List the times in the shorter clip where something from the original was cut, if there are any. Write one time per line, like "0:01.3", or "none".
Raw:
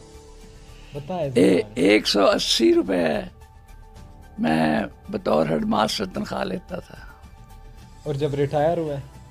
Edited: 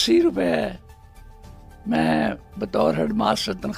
none

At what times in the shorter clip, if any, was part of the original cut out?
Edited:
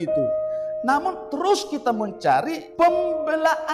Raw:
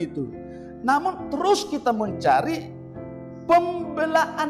0:02.6

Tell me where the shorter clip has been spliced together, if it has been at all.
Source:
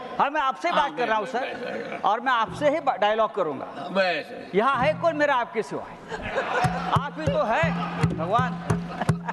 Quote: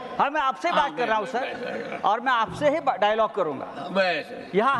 none

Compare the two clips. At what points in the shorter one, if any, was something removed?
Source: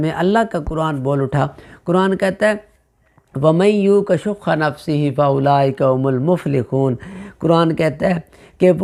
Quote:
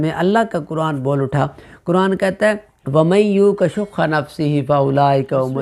0:02.7

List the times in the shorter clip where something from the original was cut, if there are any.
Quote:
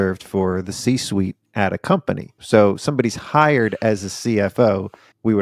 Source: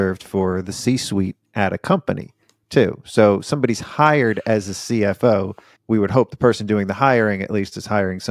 0:02.4

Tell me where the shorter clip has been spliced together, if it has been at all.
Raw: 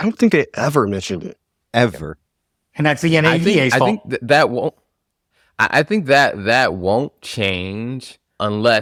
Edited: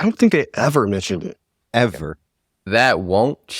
0:02.6

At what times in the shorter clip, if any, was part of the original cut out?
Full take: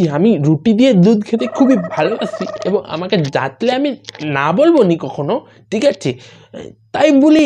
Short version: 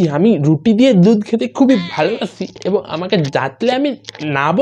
none

